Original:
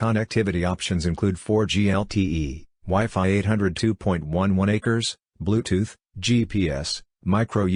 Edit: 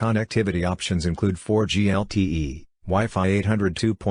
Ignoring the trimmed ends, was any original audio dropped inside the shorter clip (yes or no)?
no